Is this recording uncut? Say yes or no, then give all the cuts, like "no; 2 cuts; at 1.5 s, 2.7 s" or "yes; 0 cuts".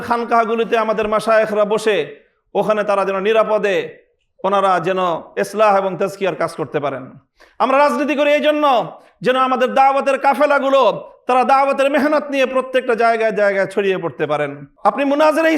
no; 1 cut; at 14.6 s